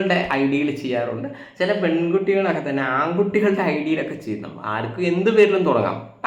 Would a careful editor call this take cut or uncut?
uncut